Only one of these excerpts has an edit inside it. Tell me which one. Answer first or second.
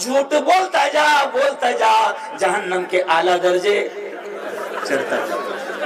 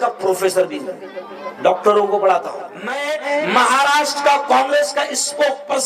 second